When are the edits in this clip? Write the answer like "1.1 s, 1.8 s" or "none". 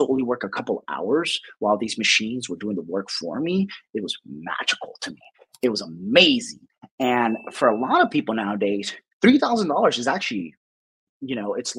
none